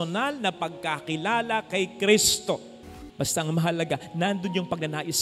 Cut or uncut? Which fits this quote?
cut